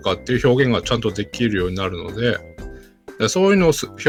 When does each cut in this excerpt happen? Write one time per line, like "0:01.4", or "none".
none